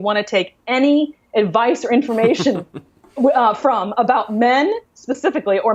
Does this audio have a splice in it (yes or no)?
no